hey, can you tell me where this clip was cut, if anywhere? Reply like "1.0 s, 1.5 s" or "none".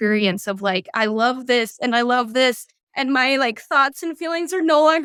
none